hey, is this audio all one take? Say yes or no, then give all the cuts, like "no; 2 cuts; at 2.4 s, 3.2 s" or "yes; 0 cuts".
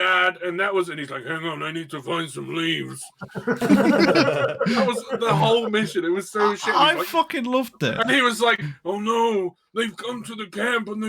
yes; 0 cuts